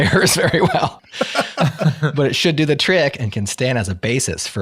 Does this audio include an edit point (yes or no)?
yes